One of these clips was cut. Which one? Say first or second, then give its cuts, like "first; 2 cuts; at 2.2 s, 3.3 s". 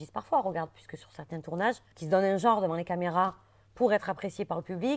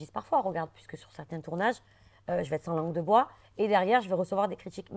first; 1 cut; at 1.9 s